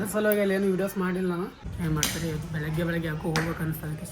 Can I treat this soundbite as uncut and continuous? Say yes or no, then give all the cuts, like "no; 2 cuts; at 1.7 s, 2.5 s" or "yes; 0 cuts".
no; 1 cut; at 1.6 s